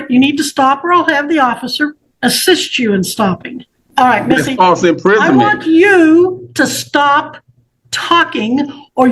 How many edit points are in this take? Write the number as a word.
two